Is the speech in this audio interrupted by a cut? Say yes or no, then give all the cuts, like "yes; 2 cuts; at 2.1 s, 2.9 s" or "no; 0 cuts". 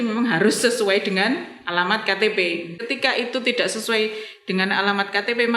yes; 1 cut; at 2.8 s